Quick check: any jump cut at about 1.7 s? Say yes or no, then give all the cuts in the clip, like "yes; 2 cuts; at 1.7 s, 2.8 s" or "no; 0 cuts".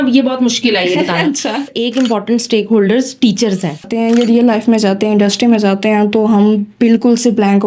yes; 2 cuts; at 1.7 s, 3.9 s